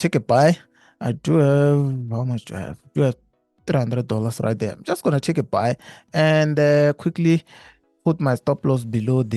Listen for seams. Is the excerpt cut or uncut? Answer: uncut